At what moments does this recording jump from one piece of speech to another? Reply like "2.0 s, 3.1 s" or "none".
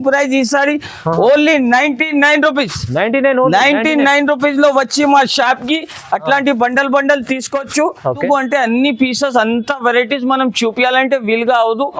8.2 s